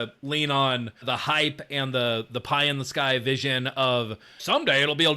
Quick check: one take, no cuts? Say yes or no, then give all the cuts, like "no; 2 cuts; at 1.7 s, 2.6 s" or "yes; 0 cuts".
no; 2 cuts; at 0.9 s, 4.3 s